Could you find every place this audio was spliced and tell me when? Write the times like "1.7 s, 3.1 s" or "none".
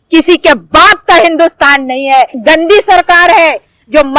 2.4 s